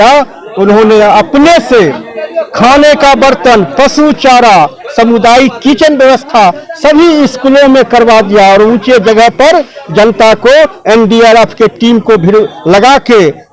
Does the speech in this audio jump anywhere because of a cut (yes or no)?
no